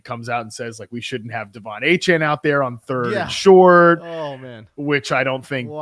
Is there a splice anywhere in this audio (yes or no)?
no